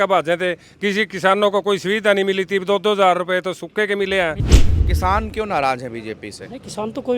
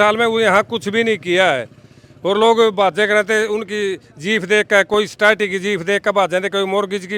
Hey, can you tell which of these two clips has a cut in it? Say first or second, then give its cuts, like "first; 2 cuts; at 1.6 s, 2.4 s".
first; 1 cut; at 4.5 s